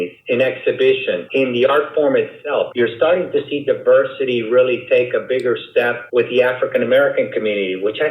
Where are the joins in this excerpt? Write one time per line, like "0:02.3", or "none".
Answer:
0:01.2
0:02.7
0:06.0